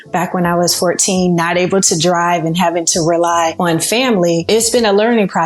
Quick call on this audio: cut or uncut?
cut